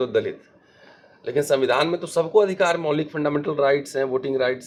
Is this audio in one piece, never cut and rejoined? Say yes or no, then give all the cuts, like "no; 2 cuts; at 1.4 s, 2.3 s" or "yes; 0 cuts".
yes; 0 cuts